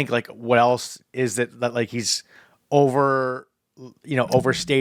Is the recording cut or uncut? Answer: uncut